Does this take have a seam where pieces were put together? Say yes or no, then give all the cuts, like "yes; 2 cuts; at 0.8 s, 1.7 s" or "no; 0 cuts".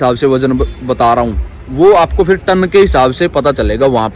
no; 0 cuts